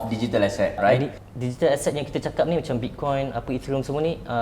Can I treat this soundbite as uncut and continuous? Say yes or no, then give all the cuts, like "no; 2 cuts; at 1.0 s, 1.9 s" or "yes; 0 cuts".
no; 1 cut; at 1.1 s